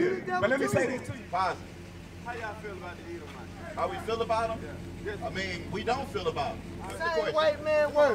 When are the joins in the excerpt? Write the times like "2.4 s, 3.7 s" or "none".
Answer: 1.1 s, 7.0 s